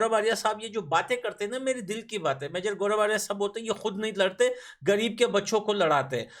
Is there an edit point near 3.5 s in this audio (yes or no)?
no